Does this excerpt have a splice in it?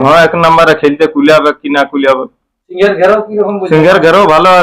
no; 0 cuts

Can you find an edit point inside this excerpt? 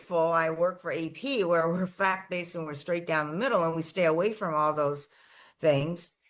no; 0 cuts

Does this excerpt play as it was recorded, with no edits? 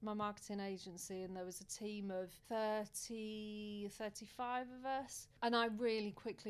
no; 2 cuts; at 2.4 s, 5.2 s

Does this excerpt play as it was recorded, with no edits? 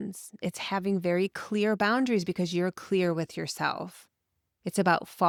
yes; 0 cuts

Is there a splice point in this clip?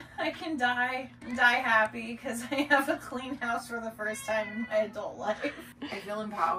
no; 0 cuts

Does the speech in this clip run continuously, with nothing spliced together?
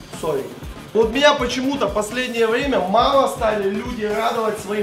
no; 1 cut; at 0.9 s

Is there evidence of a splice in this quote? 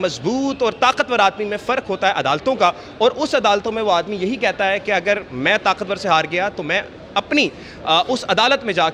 no; 0 cuts

